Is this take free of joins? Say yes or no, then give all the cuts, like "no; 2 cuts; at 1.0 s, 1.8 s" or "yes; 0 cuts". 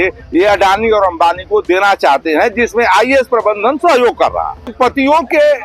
no; 1 cut; at 4.7 s